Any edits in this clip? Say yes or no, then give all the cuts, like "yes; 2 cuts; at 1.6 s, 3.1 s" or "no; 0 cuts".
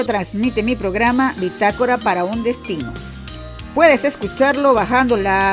no; 0 cuts